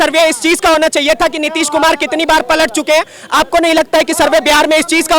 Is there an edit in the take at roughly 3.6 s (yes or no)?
no